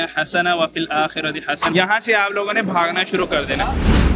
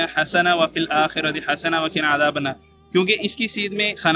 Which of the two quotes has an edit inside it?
first; 1 cut; at 1.6 s

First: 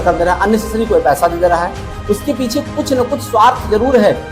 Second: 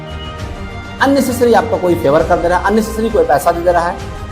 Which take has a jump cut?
second; 1 cut; at 1.0 s

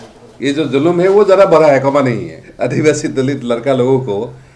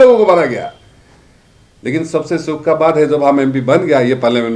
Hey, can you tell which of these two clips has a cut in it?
first; 1 cut; at 2.4 s

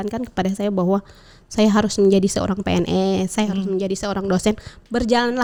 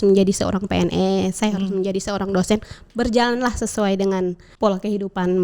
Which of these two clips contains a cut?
second; 1 cut; at 4.4 s

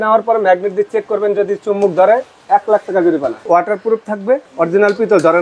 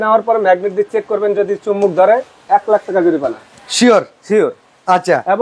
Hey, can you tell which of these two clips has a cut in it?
first; 2 cuts; at 3.5 s, 4.5 s

